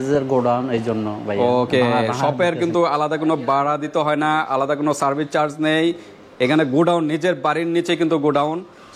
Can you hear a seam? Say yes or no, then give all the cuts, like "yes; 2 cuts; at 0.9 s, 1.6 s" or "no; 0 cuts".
no; 0 cuts